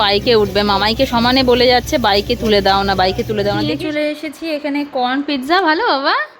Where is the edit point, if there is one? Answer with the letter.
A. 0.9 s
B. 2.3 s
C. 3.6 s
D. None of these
C